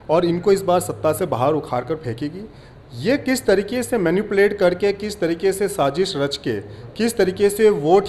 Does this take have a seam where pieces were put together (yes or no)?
no